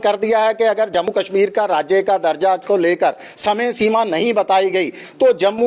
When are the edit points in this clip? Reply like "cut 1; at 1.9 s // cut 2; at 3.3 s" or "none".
cut 1; at 1.0 s